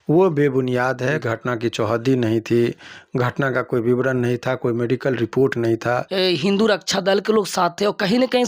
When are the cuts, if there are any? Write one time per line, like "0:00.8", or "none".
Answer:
0:01.2
0:06.1